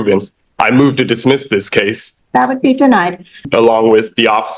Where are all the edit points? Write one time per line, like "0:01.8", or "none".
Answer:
0:02.0
0:03.4

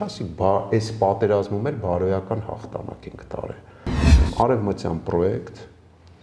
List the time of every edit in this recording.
0:04.0

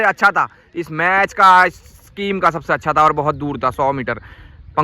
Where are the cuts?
none

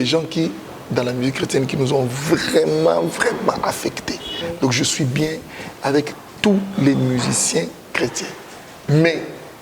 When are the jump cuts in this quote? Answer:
0:04.3

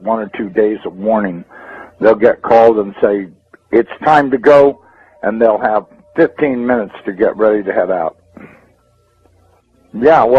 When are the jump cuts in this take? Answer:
0:08.6

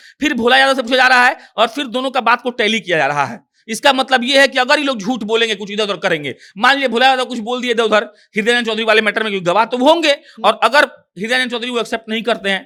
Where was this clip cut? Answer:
none

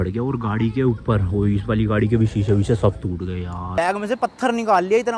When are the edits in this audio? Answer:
0:03.8

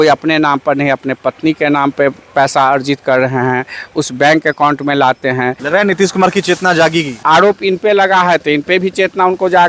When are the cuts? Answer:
0:05.6
0:07.1

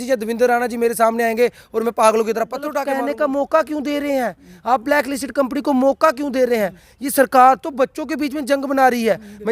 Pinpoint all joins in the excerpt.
0:02.8

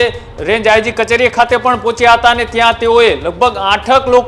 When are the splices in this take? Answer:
none

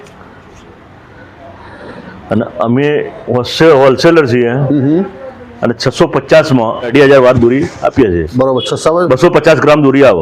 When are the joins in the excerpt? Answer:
0:06.9

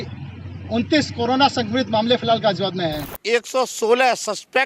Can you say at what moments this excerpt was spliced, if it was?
0:03.1

